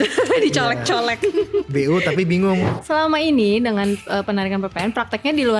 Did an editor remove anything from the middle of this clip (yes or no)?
yes